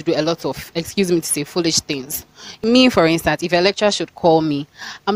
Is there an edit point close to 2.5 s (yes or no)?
yes